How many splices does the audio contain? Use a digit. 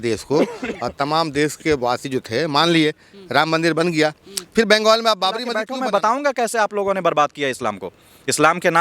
1